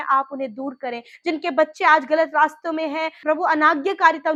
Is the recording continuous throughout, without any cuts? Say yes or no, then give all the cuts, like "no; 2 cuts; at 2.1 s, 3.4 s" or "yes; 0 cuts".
yes; 0 cuts